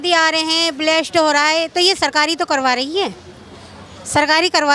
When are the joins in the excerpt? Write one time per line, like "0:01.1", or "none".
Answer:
none